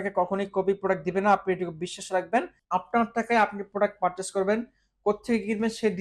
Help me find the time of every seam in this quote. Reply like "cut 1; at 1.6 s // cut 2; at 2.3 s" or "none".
cut 1; at 2.6 s